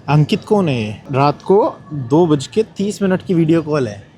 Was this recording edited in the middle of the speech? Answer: yes; 1 cut; at 1.0 s

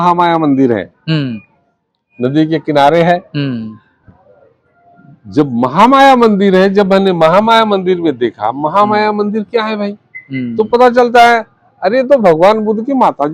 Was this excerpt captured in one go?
yes; 0 cuts

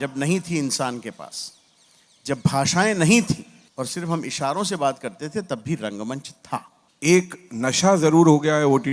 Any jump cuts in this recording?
yes; 2 cuts; at 3.6 s, 6.8 s

